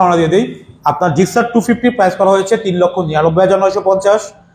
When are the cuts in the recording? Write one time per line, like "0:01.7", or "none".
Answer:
none